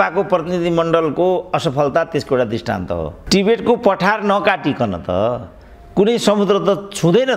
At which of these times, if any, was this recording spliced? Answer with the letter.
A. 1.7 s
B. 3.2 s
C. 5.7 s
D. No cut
B